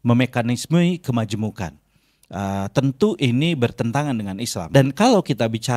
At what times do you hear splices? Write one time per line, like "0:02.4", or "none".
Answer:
0:04.7